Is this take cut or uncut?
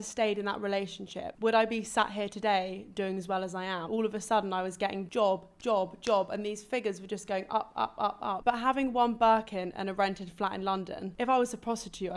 cut